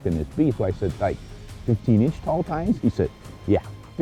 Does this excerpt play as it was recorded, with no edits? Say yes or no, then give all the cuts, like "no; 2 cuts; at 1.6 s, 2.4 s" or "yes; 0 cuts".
yes; 0 cuts